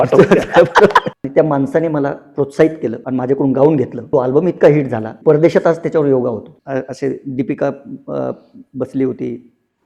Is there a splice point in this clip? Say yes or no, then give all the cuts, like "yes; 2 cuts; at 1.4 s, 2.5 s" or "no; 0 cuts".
yes; 5 cuts; at 1.1 s, 3.0 s, 4.0 s, 5.0 s, 6.5 s